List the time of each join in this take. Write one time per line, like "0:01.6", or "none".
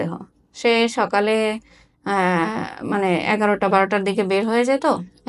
none